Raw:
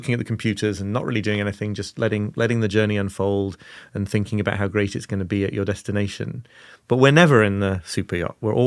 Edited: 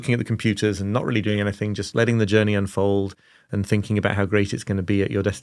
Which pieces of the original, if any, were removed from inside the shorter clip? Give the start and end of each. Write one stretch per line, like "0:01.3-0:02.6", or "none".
0:01.9-0:02.3